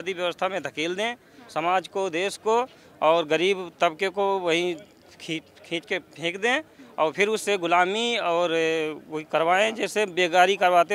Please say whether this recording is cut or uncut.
uncut